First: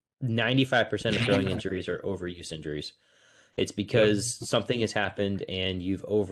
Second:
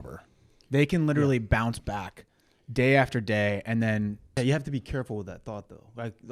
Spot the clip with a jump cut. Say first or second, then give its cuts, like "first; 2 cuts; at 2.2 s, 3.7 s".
second; 1 cut; at 4.4 s